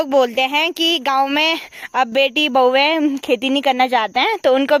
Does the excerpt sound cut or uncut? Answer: uncut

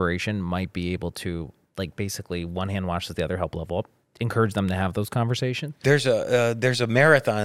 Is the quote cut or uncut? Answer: cut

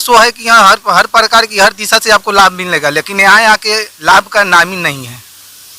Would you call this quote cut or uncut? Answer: uncut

